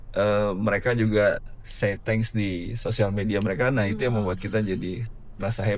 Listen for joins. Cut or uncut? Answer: uncut